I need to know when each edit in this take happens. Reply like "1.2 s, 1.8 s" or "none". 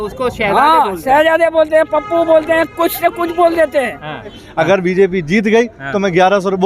4.4 s